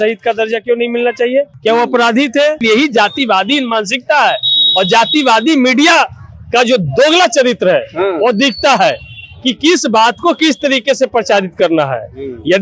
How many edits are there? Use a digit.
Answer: 2